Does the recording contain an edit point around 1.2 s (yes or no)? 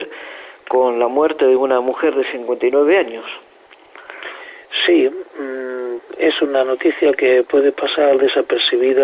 no